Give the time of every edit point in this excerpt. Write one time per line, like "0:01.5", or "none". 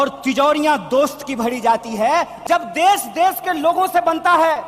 0:02.3